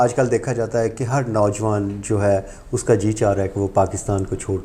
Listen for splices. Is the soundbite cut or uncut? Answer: uncut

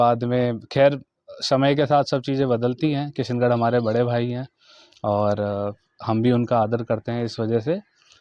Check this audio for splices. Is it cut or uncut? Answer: uncut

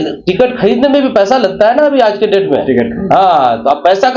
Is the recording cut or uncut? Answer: uncut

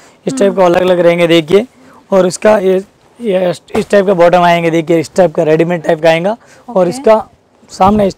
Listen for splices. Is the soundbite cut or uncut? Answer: uncut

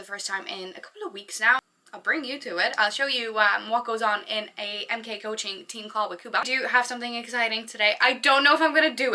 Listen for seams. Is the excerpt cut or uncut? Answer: cut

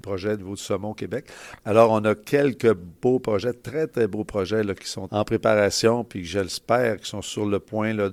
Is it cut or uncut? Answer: uncut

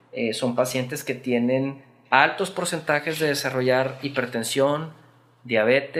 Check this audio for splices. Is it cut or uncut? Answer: uncut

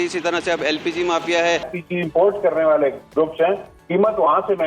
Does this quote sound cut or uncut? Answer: cut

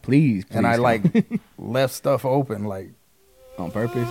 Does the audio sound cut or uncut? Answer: uncut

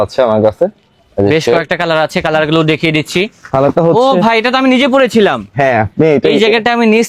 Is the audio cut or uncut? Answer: uncut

